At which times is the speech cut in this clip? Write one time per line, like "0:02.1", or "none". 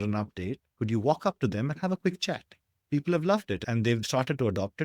0:02.7